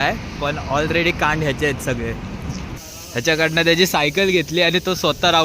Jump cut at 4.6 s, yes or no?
no